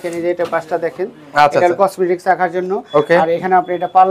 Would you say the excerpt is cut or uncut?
uncut